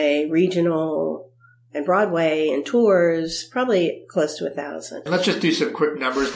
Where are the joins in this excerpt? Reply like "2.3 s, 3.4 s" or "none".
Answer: 5.0 s